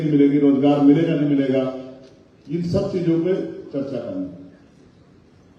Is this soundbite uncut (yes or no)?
yes